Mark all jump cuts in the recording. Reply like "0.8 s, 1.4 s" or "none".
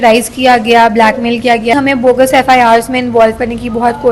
1.7 s